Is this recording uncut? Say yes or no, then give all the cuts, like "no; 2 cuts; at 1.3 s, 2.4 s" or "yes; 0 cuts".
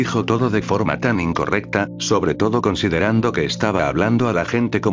yes; 0 cuts